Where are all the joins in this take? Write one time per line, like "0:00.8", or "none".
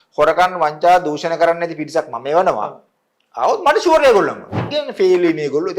0:04.7